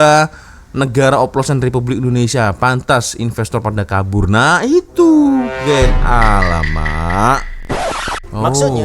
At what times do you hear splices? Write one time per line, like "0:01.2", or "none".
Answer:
0:07.7

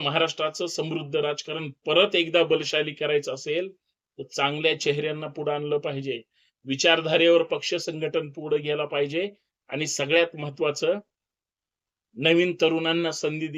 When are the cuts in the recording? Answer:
none

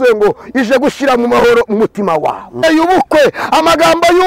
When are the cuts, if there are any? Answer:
0:02.6

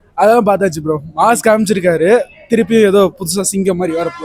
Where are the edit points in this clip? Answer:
none

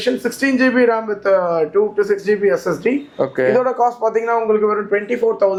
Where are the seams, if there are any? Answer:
none

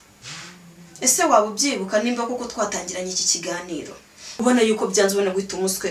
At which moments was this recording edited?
0:04.2

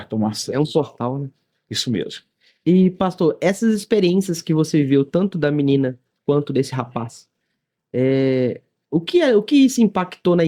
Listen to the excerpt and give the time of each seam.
none

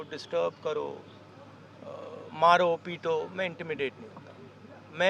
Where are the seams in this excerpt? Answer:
none

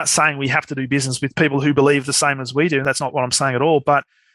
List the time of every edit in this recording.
none

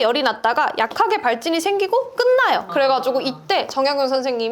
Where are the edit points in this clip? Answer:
0:02.7

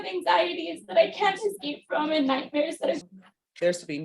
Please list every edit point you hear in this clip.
0:03.0

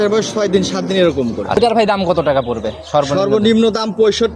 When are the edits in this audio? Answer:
0:01.6

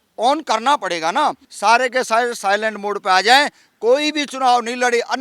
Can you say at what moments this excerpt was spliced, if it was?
0:01.5

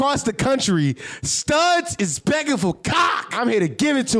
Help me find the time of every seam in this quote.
0:03.2

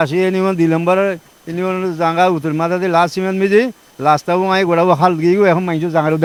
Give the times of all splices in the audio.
none

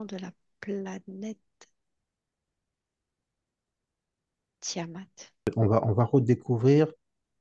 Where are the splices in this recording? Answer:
0:05.5

